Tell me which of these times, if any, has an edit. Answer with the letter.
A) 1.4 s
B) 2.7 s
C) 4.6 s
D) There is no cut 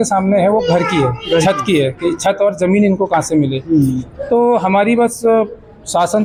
D